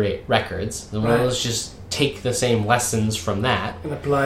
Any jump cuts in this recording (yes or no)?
no